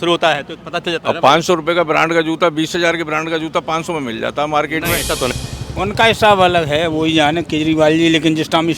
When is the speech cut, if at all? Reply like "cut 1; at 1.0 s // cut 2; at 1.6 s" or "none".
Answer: cut 1; at 5.3 s